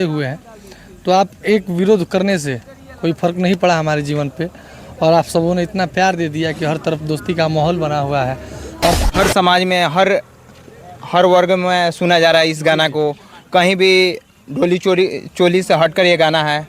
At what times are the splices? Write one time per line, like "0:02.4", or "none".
0:09.0